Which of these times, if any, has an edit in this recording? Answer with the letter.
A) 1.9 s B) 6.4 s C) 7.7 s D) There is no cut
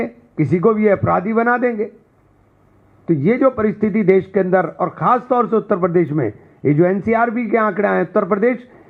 D